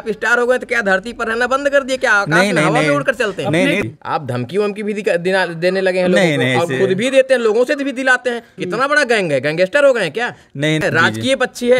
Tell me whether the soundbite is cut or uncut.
cut